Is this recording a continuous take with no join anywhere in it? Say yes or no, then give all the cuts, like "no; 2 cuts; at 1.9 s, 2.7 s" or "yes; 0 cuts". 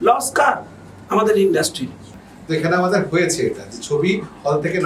no; 1 cut; at 2.2 s